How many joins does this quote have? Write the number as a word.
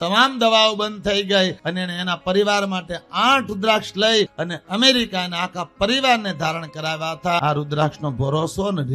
three